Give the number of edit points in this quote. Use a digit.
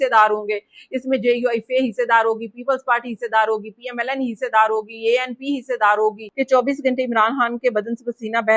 1